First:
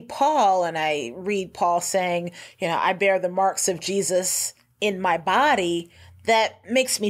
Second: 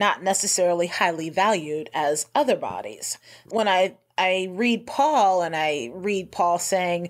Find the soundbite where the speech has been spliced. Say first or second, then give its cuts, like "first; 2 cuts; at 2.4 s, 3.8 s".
second; 1 cut; at 3.4 s